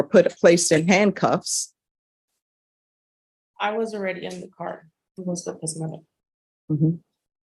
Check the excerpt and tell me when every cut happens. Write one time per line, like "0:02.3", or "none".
0:05.4